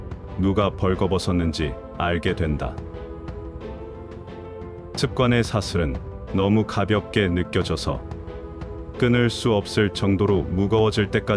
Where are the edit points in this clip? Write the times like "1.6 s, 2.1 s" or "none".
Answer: 2.7 s, 5.0 s